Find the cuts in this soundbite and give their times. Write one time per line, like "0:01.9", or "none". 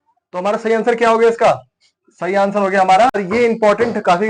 0:03.2